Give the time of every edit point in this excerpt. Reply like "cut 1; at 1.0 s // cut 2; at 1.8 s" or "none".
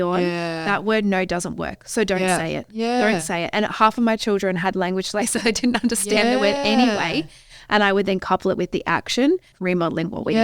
cut 1; at 9.5 s